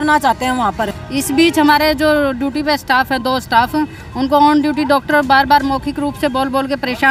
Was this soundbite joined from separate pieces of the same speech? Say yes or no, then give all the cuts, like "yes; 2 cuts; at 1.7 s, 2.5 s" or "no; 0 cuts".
yes; 1 cut; at 1.0 s